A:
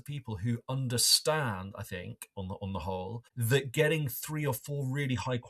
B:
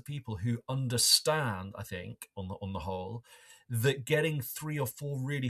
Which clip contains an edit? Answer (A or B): A